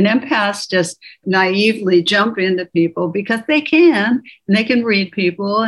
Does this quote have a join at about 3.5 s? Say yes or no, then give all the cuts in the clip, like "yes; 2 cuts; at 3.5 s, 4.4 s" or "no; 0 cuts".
no; 1 cut; at 1.2 s